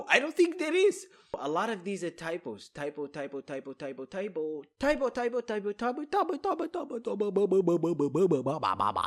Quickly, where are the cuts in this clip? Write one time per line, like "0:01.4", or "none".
0:01.4